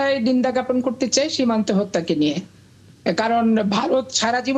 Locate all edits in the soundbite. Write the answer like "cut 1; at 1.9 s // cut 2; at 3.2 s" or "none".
none